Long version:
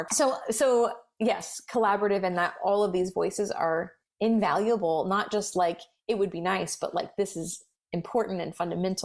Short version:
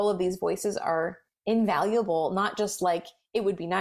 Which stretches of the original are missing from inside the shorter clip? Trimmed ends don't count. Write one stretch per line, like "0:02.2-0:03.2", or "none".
none